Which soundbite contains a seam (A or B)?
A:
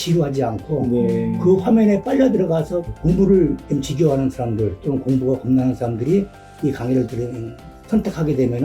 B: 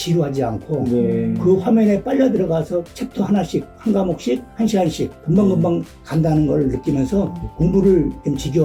A